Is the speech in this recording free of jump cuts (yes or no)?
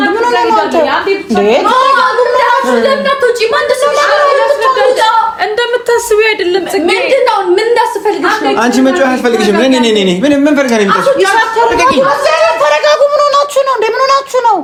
yes